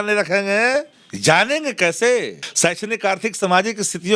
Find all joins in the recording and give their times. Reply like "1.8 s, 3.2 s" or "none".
1.0 s, 2.4 s